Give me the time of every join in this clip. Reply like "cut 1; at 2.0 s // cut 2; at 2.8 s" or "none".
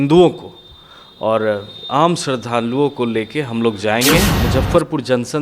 cut 1; at 4.4 s